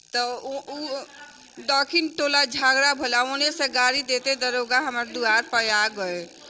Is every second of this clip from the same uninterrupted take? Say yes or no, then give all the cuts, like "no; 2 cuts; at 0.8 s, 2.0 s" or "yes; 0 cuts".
yes; 0 cuts